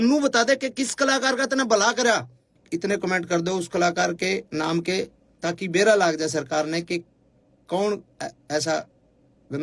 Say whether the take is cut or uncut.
cut